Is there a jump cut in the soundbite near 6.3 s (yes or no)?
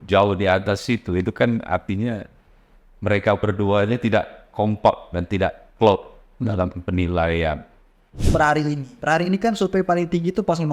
no